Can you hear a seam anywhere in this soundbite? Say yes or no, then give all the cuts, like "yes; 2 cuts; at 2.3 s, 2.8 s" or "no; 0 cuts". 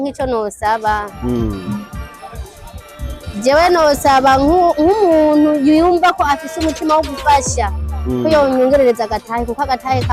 no; 0 cuts